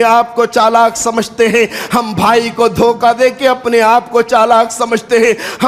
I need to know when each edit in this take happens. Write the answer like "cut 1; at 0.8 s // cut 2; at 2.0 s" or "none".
none